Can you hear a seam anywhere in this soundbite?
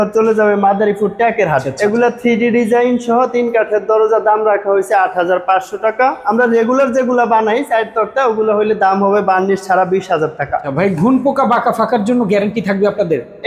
yes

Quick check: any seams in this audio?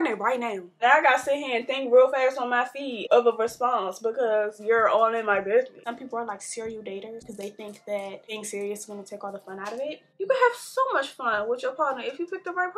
yes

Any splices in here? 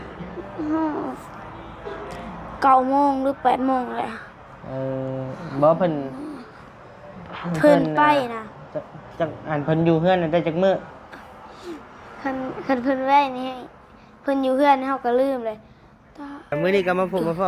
yes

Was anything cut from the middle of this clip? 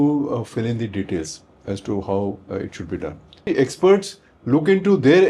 yes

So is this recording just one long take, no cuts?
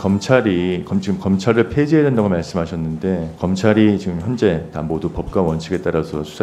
yes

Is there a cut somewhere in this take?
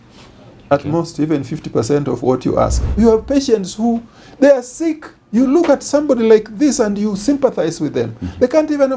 yes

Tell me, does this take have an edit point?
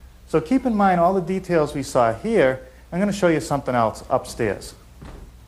no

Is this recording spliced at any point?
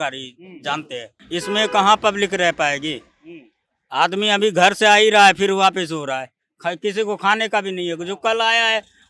yes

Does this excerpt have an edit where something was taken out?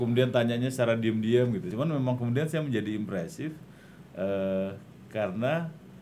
yes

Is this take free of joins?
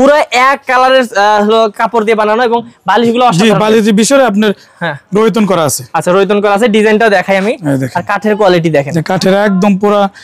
yes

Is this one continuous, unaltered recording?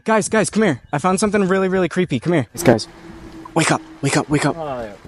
no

